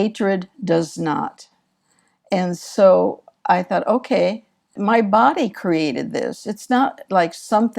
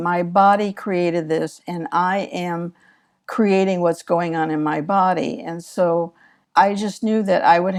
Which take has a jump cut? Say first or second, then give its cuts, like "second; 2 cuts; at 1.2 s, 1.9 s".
first; 1 cut; at 4.7 s